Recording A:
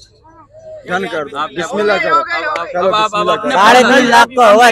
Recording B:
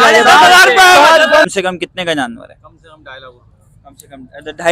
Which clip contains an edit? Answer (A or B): B